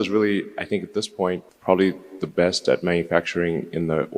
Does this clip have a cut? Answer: yes; 1 cut; at 1.5 s

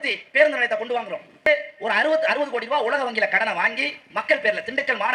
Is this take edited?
yes; 1 cut; at 1.5 s

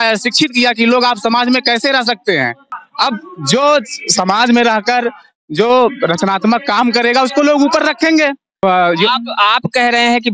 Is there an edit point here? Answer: yes; 2 cuts; at 2.8 s, 8.6 s

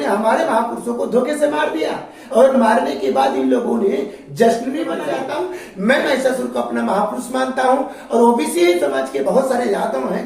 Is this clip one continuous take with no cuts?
no; 1 cut; at 5.0 s

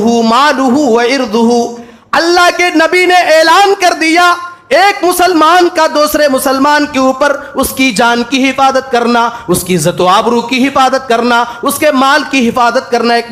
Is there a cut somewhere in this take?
no; 0 cuts

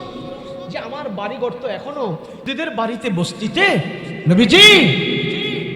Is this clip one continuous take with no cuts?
no; 1 cut; at 2.5 s

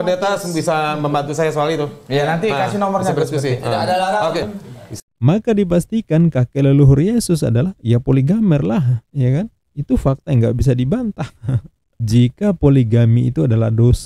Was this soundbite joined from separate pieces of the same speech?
yes; 2 cuts; at 5.0 s, 11.9 s

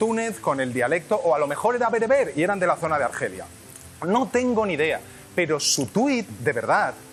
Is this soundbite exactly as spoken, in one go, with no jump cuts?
yes; 0 cuts

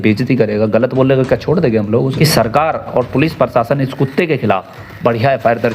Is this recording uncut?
no; 1 cut; at 2.2 s

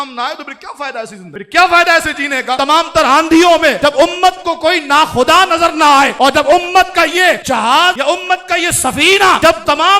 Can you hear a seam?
yes; 1 cut; at 2.6 s

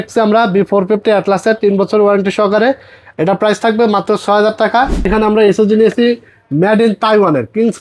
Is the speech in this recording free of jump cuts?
no; 1 cut; at 5.1 s

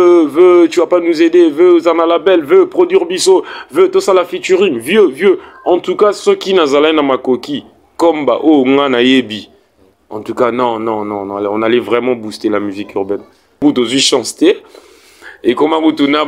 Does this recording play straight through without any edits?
no; 1 cut; at 13.6 s

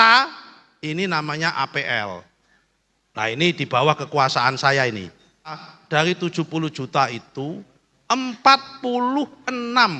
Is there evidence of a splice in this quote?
yes; 1 cut; at 5.7 s

